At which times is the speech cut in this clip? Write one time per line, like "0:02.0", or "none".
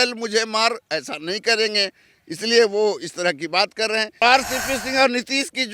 0:04.2